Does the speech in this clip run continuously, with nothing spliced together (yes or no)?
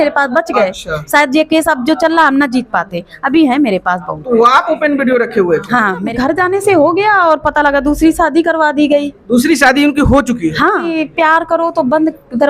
no